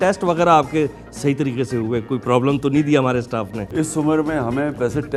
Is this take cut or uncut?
uncut